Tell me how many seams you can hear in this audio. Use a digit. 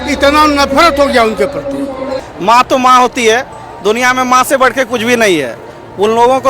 1